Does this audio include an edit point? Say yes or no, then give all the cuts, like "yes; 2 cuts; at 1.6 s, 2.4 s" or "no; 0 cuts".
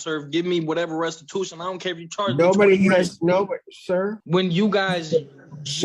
yes; 1 cut; at 4.2 s